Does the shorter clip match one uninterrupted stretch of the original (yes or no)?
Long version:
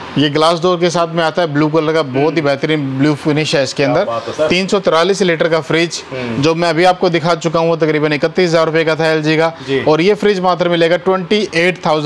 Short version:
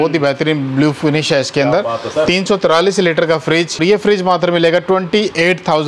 no